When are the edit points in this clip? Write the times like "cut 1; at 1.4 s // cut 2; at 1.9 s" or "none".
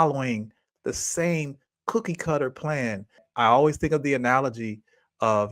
cut 1; at 3.2 s